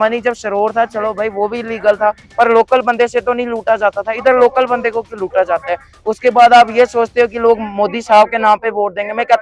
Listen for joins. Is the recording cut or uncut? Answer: uncut